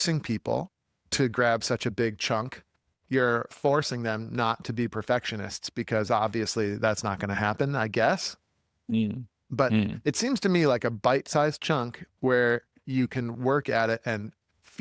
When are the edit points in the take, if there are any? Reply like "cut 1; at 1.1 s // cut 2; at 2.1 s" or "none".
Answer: none